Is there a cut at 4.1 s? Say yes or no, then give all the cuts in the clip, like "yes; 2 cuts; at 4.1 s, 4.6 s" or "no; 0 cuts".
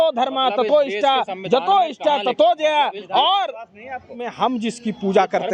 yes; 1 cut; at 4.1 s